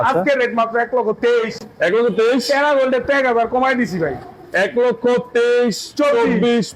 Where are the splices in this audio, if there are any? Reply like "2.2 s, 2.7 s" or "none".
none